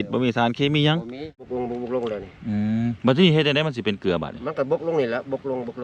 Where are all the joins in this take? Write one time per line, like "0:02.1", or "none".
0:01.5